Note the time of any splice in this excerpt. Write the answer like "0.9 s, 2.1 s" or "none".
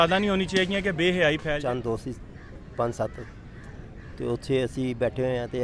1.6 s